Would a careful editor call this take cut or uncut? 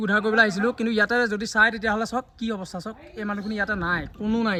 uncut